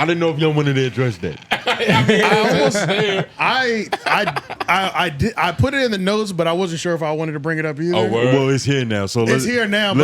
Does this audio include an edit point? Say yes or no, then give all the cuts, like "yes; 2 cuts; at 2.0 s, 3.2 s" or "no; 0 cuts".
no; 0 cuts